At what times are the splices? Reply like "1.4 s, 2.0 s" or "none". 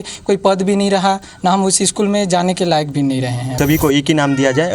3.5 s